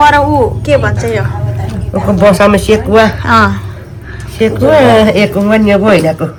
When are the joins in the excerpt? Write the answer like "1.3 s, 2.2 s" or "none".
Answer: none